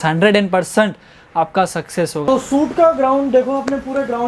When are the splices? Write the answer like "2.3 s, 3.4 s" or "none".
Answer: 2.2 s